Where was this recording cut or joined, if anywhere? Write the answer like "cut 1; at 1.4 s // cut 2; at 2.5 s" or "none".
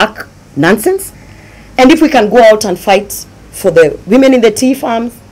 none